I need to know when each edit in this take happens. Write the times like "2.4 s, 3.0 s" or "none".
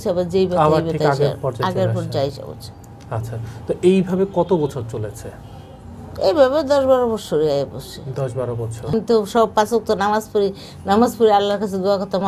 8.9 s